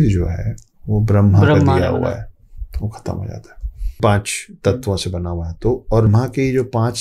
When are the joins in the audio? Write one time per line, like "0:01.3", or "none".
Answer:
0:04.0
0:06.1